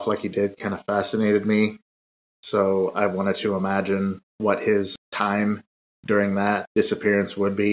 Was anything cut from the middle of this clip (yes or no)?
yes